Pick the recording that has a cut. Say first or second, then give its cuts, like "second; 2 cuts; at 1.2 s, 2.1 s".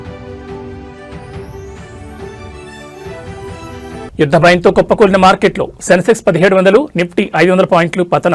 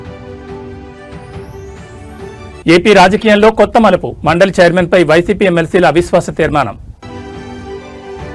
first; 2 cuts; at 2.5 s, 3.5 s